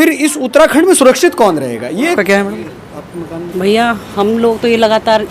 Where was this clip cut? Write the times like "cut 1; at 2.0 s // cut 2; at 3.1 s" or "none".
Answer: cut 1; at 2.1 s

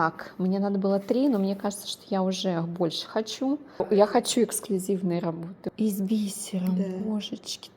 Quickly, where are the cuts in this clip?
cut 1; at 3.8 s // cut 2; at 5.5 s

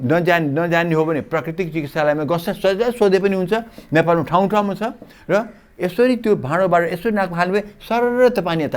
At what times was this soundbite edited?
none

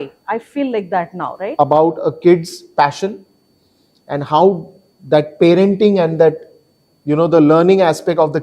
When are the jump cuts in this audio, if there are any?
cut 1; at 1.5 s

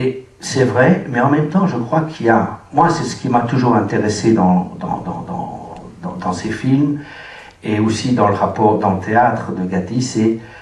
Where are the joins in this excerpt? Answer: cut 1; at 3.9 s

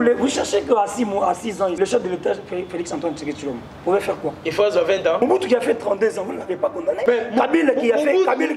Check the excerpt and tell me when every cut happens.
cut 1; at 1.8 s // cut 2; at 5.2 s // cut 3; at 7.0 s

